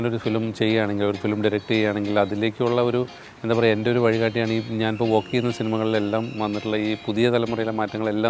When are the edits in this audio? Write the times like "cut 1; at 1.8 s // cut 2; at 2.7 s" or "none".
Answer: none